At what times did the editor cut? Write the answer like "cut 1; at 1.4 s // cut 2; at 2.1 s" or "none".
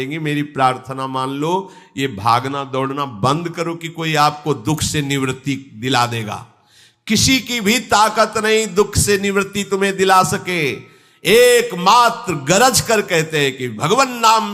none